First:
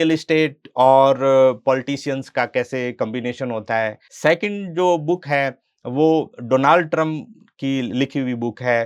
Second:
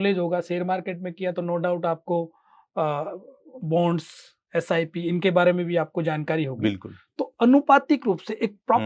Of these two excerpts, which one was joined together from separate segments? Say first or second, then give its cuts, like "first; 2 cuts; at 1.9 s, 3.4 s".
first; 1 cut; at 4.1 s